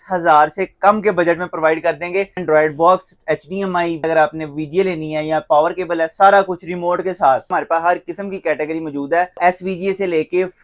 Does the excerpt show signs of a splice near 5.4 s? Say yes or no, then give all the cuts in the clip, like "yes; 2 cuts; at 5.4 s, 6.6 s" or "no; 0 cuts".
no; 4 cuts; at 2.4 s, 4.0 s, 7.5 s, 9.4 s